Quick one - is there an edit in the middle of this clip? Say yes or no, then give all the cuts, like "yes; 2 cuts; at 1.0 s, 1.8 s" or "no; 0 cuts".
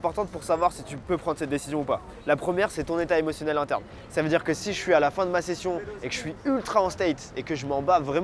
no; 0 cuts